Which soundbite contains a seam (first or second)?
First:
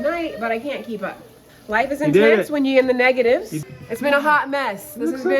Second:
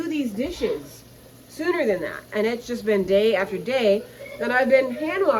first